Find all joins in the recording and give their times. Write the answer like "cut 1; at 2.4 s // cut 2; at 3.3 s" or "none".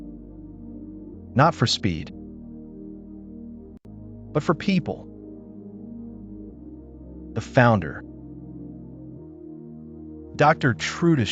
cut 1; at 1.0 s // cut 2; at 5.1 s // cut 3; at 6.9 s // cut 4; at 8.5 s // cut 5; at 10.3 s